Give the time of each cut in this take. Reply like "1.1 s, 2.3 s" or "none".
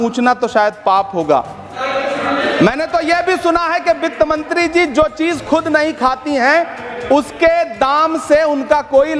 none